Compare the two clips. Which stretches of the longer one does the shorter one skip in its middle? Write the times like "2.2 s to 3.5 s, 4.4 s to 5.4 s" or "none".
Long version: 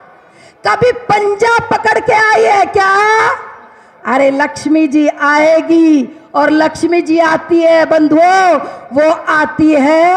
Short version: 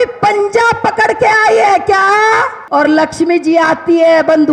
3.4 s to 6.2 s